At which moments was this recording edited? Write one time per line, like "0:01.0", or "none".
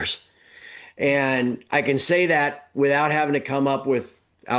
none